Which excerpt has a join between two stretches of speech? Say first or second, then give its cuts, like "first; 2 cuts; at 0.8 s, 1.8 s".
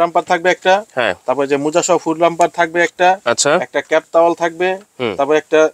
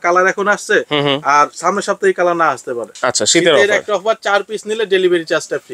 second; 1 cut; at 2.9 s